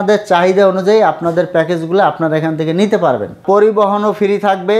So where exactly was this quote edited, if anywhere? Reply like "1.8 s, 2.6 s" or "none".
3.4 s